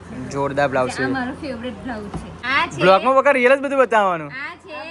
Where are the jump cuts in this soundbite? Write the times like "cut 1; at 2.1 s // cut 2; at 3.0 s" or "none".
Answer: cut 1; at 2.4 s